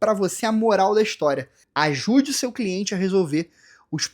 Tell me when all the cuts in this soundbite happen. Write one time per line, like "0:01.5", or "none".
0:01.6

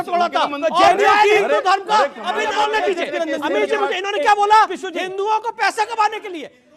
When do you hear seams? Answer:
0:02.5

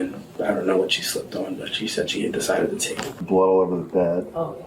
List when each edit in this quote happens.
0:03.1

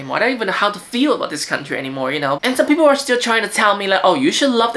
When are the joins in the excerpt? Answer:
0:02.4

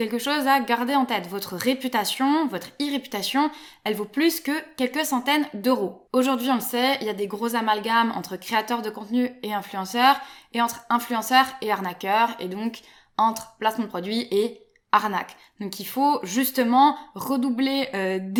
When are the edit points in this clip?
none

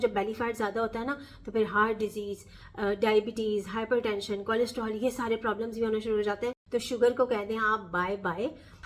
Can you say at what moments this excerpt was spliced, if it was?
0:06.6

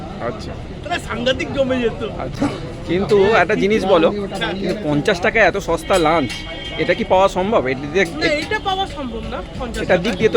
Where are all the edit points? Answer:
none

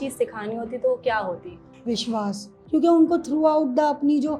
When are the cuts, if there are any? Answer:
0:01.7
0:02.5

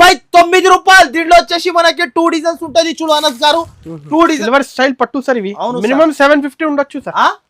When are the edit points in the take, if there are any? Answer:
0:04.4

